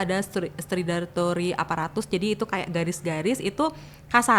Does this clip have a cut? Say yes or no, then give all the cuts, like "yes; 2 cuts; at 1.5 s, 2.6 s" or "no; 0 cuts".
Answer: no; 0 cuts